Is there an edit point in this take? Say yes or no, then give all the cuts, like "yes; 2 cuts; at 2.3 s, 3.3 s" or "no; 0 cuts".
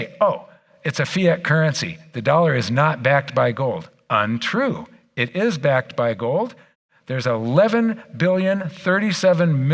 no; 0 cuts